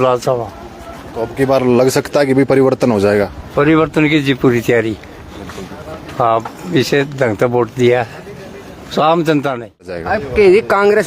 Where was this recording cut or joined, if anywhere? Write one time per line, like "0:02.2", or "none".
0:10.1